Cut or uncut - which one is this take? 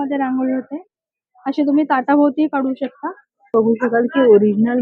cut